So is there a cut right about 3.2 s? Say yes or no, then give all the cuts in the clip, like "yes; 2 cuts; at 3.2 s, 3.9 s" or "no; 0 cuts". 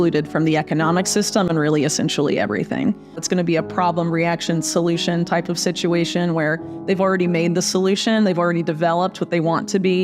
yes; 1 cut; at 3.2 s